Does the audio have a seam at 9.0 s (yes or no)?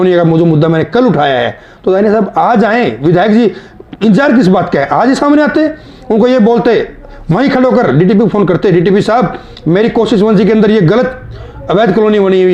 no